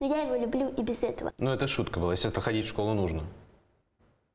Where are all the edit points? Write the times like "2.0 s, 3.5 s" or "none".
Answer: 1.3 s